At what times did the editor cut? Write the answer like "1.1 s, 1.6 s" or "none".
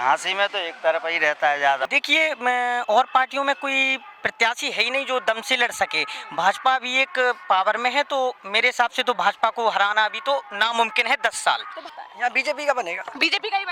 1.8 s, 11.8 s